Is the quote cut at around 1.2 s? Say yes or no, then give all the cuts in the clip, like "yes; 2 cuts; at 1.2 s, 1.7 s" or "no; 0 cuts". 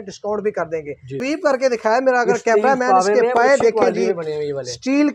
yes; 1 cut; at 1.2 s